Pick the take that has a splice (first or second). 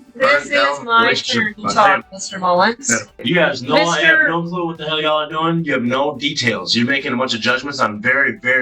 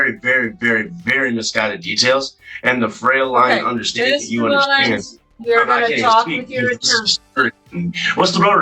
first